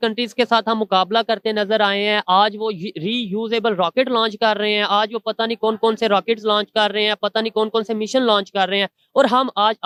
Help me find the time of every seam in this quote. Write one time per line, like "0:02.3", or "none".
none